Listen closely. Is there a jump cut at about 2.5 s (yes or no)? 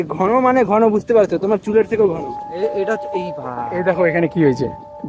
yes